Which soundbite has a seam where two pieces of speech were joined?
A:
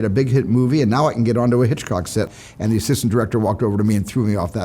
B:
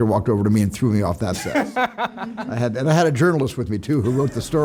A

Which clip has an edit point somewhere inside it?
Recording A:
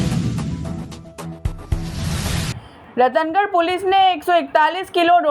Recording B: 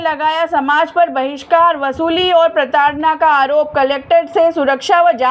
A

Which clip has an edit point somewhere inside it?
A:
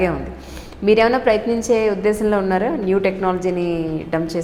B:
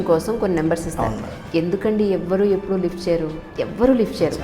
B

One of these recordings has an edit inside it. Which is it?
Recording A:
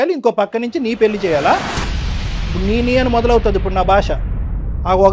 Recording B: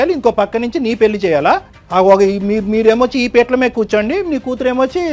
B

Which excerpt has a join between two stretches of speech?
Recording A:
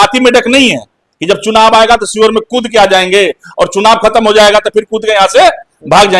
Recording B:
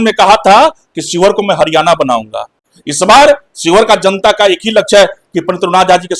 B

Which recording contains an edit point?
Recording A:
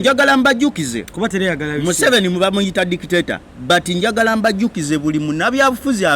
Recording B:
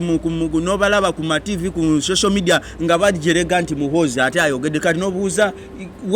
A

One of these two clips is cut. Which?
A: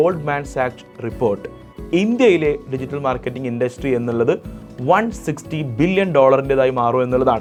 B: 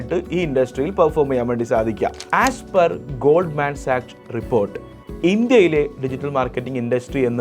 B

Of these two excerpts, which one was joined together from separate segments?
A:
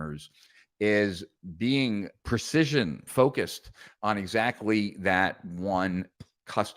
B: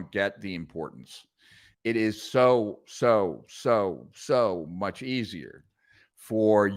A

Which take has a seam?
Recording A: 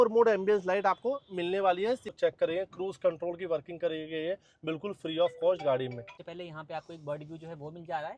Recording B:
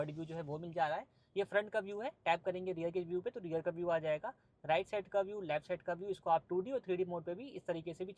A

